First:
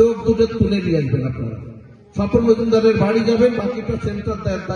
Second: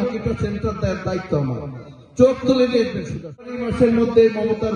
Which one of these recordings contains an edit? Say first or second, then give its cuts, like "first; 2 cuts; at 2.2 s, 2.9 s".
second; 1 cut; at 3.7 s